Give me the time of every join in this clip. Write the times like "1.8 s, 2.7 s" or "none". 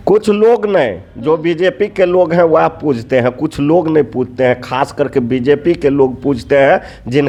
none